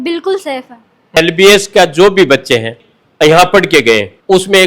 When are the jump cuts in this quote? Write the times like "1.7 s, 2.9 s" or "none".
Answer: 1.2 s, 2.7 s